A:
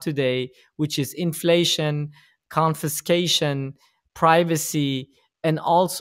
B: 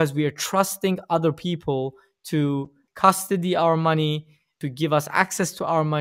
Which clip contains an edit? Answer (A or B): B